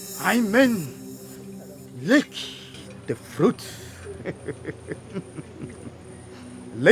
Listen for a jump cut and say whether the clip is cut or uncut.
uncut